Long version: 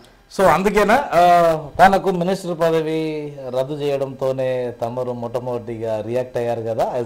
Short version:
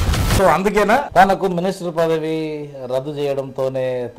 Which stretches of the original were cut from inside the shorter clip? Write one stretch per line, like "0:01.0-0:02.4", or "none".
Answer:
0:01.1-0:01.7